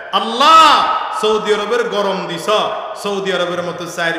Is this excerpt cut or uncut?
uncut